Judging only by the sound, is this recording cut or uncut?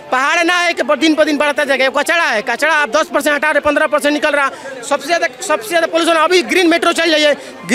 uncut